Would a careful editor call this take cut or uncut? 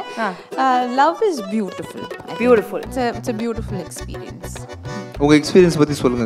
uncut